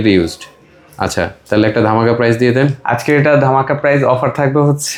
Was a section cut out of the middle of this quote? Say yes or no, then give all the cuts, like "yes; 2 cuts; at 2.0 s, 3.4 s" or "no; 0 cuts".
no; 0 cuts